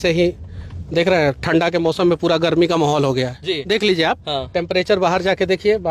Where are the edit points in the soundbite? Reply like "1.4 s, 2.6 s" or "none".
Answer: none

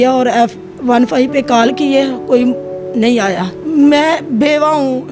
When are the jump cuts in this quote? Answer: 3.5 s

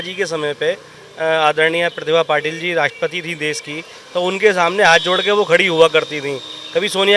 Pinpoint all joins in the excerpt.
none

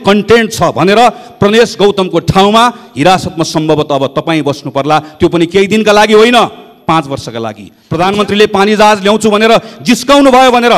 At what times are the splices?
7.7 s

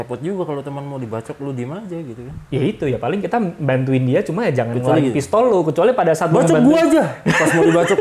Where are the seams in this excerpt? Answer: none

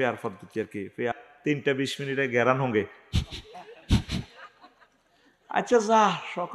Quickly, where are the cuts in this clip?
1.1 s

